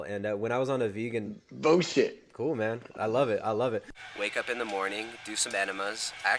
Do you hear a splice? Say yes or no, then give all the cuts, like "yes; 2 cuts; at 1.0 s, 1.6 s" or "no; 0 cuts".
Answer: yes; 1 cut; at 4.0 s